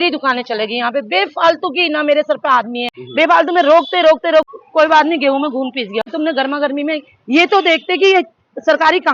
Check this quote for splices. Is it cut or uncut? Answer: cut